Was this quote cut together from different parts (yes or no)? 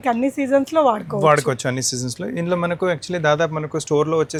no